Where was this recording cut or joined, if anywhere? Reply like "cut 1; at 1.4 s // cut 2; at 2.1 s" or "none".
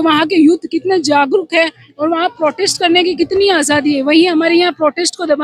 none